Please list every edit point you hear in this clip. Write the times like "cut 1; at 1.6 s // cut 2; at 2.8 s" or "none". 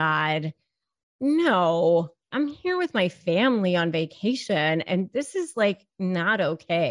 cut 1; at 2.2 s